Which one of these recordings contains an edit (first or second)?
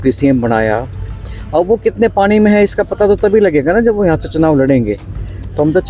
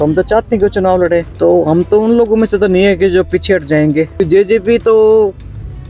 second